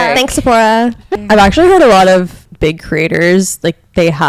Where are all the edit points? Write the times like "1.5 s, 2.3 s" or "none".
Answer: 1.1 s, 2.4 s